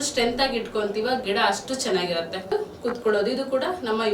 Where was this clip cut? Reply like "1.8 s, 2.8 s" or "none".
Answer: 2.5 s